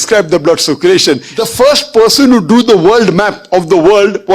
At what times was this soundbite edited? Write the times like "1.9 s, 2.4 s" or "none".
1.3 s